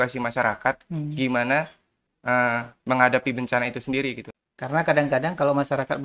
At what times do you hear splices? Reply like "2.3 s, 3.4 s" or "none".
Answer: 4.3 s